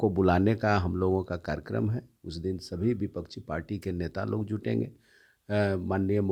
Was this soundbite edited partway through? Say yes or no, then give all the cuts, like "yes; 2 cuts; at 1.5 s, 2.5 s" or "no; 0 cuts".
no; 0 cuts